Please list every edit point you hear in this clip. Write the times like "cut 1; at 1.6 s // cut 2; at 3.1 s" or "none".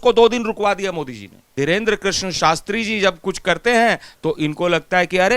cut 1; at 1.5 s